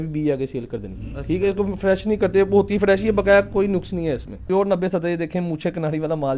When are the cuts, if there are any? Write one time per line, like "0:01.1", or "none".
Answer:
0:04.3